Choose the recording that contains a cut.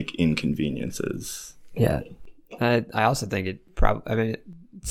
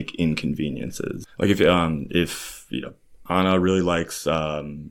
second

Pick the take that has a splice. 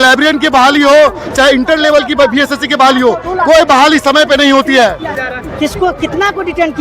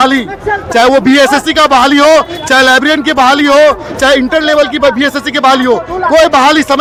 first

